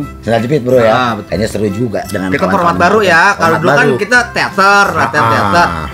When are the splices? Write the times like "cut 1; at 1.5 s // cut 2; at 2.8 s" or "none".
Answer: cut 1; at 1.2 s